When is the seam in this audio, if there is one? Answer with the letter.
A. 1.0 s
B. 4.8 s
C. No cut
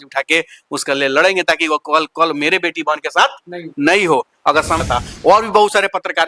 B